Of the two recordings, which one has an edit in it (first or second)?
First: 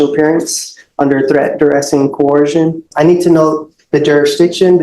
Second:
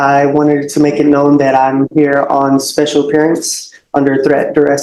first